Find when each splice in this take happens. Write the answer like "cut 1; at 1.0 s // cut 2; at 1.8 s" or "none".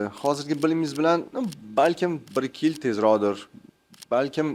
none